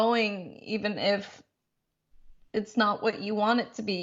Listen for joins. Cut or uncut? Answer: uncut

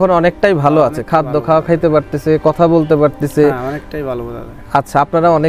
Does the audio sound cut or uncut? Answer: uncut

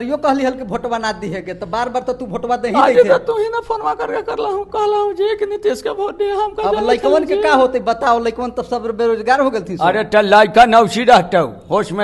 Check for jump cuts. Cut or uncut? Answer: uncut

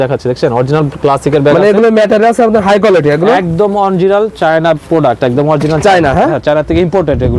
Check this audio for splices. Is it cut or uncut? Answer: uncut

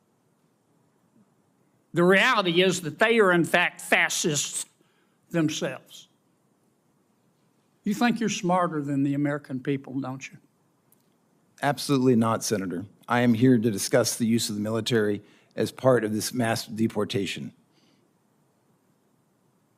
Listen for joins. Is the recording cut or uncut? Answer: cut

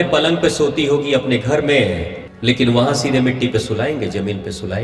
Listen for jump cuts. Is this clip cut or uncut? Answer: uncut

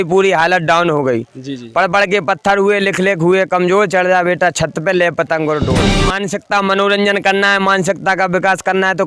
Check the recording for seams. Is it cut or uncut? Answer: cut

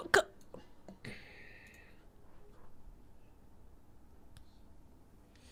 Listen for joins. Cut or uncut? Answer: uncut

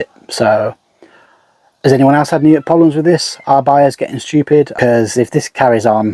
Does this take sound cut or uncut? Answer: cut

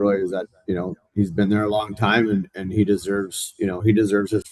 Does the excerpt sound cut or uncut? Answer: uncut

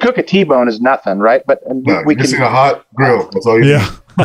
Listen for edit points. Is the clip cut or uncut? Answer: uncut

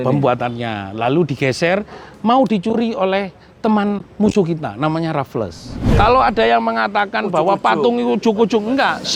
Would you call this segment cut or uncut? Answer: cut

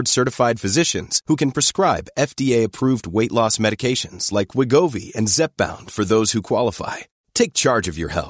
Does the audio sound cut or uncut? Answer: uncut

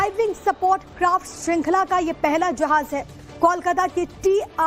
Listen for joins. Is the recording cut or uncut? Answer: uncut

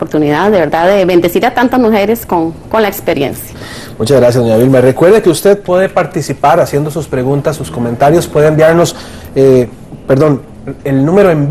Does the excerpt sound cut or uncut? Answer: uncut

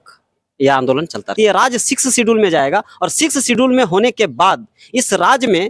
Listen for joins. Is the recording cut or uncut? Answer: cut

